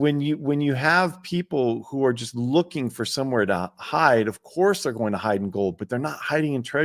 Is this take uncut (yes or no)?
yes